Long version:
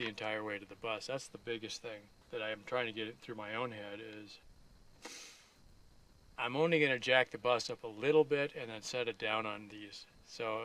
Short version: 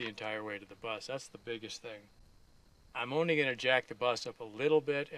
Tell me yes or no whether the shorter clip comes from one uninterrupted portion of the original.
no